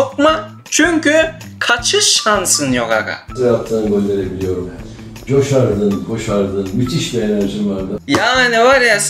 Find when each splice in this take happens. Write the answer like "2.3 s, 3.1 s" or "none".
3.2 s, 8.0 s